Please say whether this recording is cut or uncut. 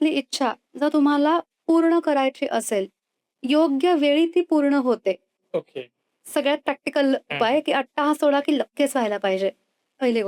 uncut